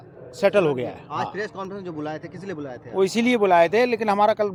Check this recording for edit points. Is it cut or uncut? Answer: uncut